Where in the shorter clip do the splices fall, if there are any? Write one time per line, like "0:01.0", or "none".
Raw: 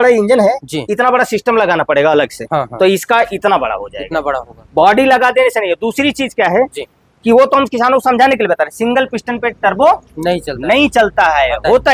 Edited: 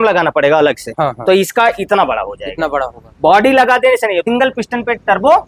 0:04.2